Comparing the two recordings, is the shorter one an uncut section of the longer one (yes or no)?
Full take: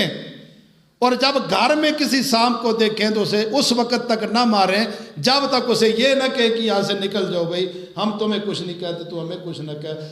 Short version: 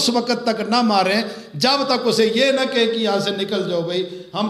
yes